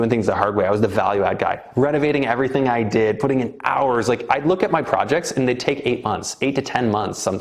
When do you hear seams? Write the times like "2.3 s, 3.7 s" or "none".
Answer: none